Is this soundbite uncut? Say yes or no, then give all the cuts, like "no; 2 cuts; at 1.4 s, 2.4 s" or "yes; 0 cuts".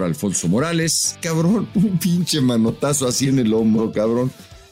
no; 1 cut; at 1.3 s